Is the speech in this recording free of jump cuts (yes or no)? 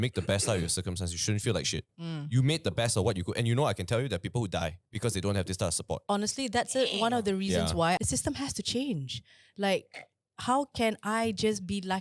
no